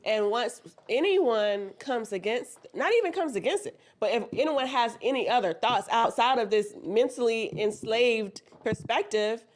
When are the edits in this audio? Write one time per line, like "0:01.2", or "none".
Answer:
none